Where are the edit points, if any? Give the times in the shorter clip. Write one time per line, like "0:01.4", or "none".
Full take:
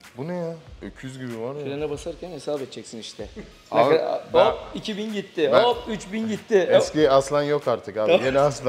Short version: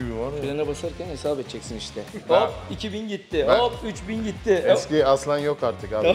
0:02.2

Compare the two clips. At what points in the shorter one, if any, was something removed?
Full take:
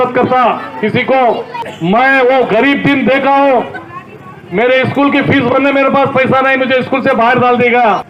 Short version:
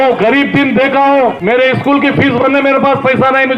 0:01.4

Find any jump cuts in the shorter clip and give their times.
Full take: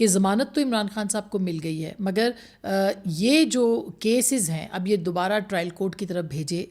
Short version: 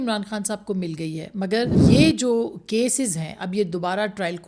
0:01.8

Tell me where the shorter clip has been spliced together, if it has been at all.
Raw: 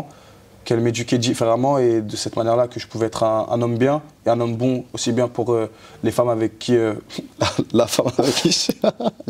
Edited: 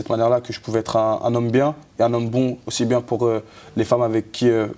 none

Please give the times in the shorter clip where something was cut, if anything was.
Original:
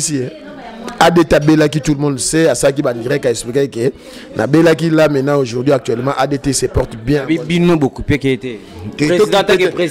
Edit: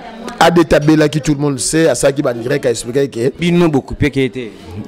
0:03.4

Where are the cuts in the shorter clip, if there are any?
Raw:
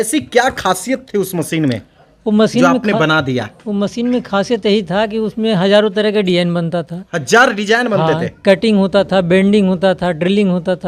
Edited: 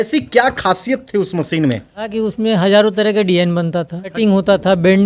0:02.1
0:04.2

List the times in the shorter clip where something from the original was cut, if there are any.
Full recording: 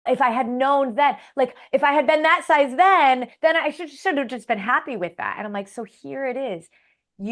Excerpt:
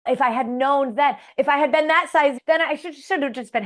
0:01.2
0:02.4

